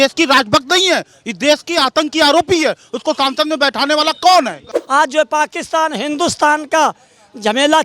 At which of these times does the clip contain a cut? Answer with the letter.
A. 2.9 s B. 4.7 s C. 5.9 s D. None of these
B